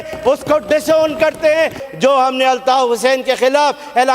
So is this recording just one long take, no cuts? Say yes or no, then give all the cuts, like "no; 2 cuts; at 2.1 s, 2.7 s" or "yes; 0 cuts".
no; 1 cut; at 1.8 s